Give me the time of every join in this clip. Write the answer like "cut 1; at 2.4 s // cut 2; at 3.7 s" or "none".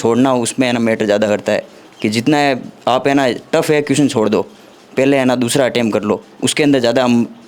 none